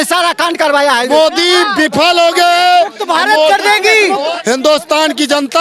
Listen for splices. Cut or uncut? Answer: cut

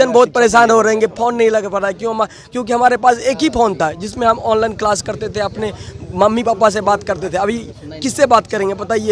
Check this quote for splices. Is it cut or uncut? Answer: uncut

